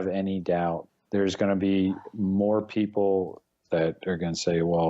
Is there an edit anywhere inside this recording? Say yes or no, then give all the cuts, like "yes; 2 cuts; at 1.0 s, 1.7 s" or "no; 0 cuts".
yes; 2 cuts; at 0.9 s, 3.6 s